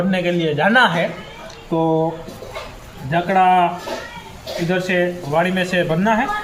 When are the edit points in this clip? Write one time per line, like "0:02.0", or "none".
none